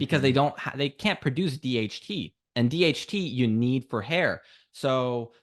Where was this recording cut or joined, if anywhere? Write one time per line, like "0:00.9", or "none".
none

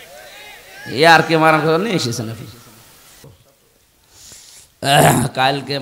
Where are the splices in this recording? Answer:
0:03.2

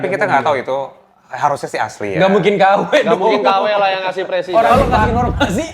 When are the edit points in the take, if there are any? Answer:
0:04.7

